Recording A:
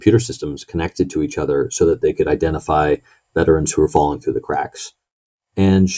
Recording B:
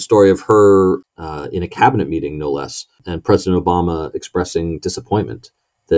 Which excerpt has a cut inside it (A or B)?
B